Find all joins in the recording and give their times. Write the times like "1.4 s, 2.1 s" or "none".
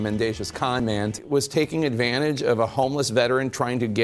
1.1 s